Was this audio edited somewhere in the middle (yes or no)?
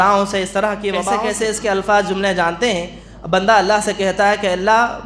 yes